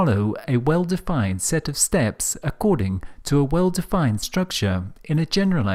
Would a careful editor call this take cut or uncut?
uncut